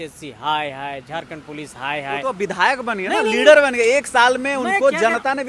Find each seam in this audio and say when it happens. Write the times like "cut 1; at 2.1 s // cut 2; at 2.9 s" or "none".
none